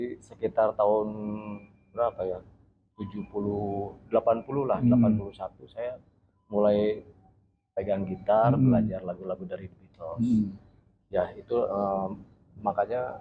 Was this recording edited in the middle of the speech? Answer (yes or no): no